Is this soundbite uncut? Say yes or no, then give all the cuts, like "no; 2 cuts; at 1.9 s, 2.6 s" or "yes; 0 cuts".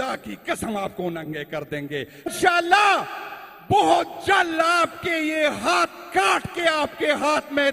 no; 1 cut; at 2.2 s